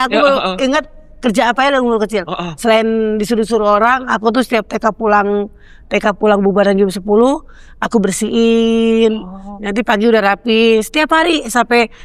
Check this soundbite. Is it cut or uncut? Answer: uncut